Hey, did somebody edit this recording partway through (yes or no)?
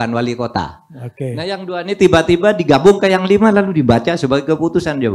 no